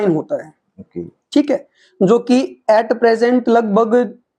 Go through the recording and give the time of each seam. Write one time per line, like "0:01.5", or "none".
none